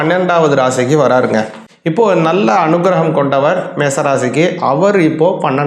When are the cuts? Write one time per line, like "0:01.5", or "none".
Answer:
0:01.6

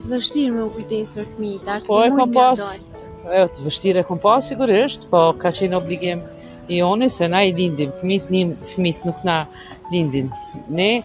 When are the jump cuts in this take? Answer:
none

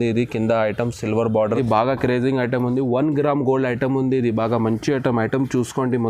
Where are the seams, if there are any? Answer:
0:01.6

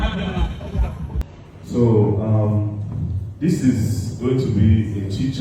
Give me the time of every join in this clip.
0:01.2

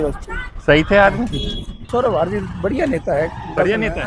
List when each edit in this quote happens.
0:01.8

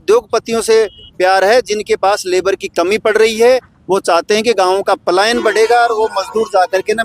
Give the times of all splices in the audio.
none

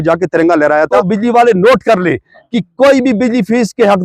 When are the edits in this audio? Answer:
0:01.0

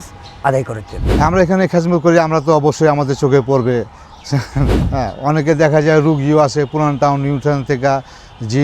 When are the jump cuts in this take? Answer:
0:01.0
0:04.8

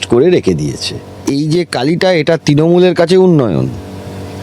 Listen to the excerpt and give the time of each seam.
0:01.2

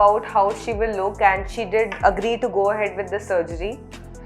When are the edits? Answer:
none

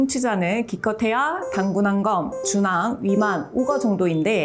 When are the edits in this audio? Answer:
none

